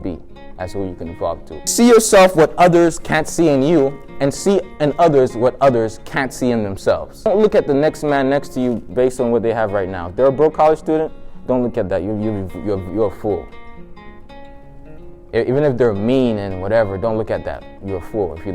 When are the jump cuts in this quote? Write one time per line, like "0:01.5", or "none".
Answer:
0:01.7
0:07.3